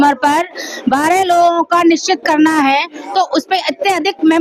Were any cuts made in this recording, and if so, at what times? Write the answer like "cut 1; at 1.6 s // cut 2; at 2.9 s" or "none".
none